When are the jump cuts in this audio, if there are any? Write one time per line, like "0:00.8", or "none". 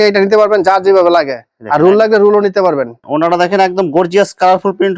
none

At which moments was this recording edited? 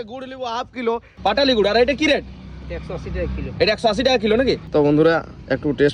0:01.1
0:04.6

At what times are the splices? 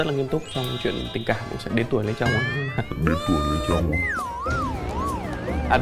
none

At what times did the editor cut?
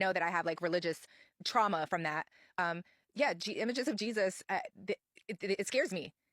0:02.6

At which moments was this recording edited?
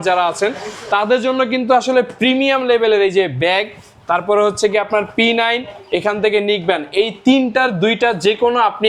none

